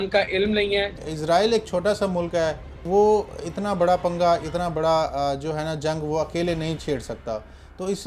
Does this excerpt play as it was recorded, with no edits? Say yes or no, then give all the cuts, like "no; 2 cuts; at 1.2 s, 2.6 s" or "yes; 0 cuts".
no; 2 cuts; at 0.9 s, 2.7 s